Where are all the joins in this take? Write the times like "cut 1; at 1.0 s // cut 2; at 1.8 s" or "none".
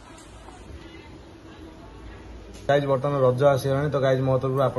cut 1; at 2.7 s